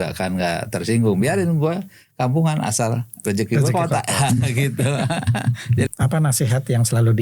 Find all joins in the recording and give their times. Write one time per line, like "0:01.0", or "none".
0:05.9